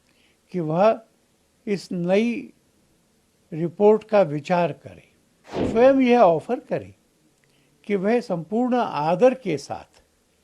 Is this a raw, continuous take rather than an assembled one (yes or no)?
no